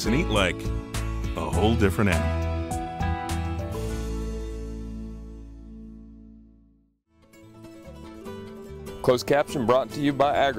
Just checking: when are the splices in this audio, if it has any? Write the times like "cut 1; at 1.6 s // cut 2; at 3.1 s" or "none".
cut 1; at 7.3 s // cut 2; at 8.6 s